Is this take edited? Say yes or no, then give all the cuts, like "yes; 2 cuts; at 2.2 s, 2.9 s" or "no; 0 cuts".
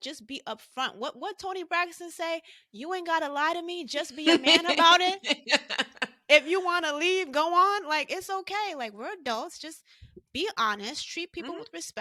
no; 0 cuts